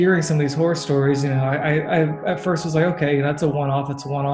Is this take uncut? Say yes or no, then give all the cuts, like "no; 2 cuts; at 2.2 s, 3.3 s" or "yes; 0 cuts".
yes; 0 cuts